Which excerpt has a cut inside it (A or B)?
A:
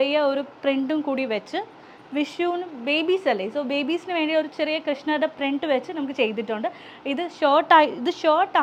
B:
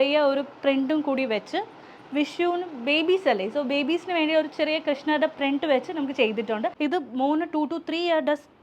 B